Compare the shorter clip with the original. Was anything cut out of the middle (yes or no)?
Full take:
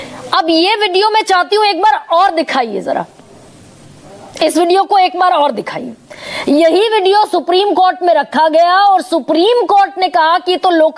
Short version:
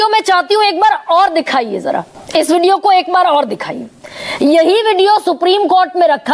yes